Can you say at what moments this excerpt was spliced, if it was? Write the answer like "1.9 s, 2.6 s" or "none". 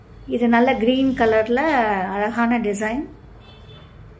none